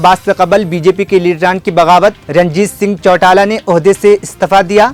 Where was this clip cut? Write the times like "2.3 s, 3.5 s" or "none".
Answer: none